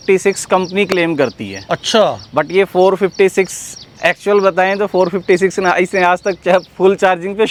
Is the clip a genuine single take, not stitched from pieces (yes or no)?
yes